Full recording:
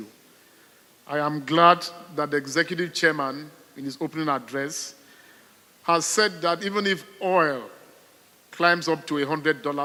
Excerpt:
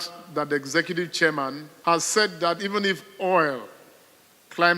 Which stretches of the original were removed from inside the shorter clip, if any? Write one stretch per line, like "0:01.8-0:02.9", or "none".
0:03.5-0:05.7